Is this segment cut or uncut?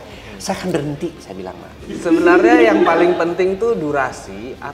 cut